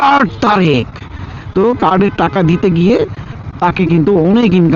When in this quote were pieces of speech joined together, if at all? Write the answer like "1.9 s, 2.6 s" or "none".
none